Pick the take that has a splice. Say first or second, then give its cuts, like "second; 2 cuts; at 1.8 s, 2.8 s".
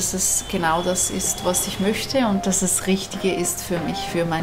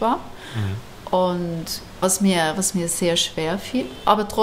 second; 1 cut; at 2.0 s